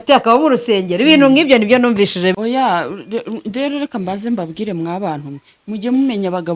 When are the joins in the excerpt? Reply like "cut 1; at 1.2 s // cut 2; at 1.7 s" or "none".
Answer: cut 1; at 2.3 s